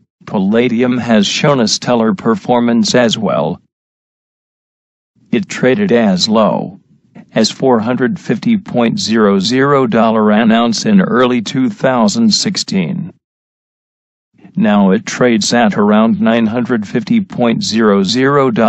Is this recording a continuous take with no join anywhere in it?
yes; 0 cuts

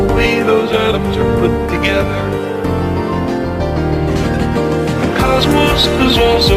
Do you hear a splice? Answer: no; 0 cuts

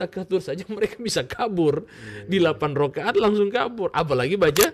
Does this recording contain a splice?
no; 0 cuts

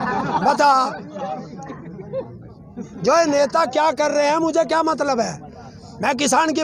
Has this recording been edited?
no; 0 cuts

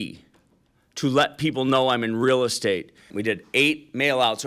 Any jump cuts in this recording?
yes; 1 cut; at 3.1 s

